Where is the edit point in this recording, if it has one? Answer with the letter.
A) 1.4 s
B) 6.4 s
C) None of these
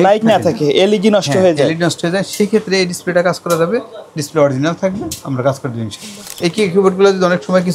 B